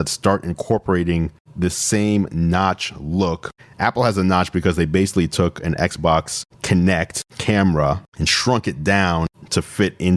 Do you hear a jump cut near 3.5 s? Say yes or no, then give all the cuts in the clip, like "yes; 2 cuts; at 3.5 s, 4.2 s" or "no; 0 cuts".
yes; 1 cut; at 3.5 s